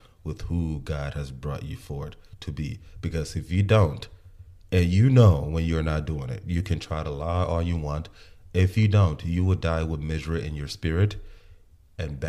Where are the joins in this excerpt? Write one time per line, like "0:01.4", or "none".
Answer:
none